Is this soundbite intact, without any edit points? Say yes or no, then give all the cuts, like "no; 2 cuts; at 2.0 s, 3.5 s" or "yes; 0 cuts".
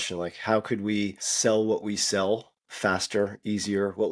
no; 1 cut; at 1.2 s